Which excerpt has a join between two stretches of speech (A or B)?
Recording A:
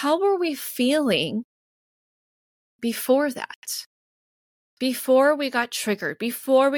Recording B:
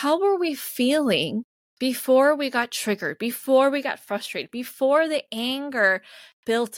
B